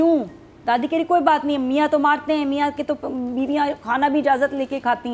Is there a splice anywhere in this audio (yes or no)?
no